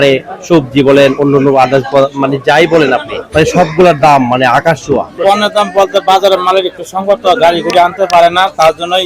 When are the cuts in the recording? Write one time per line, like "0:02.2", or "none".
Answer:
0:03.2
0:05.1